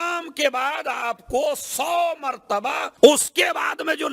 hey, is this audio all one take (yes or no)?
no